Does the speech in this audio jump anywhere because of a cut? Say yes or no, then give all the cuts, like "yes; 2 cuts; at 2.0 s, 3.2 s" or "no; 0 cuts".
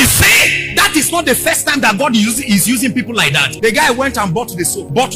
yes; 1 cut; at 3.4 s